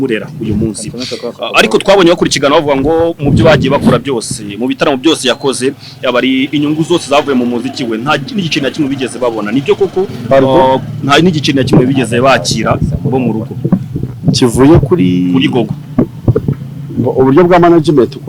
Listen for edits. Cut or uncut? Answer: uncut